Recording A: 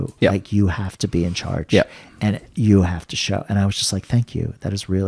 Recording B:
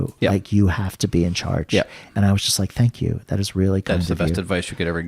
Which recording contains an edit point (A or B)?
B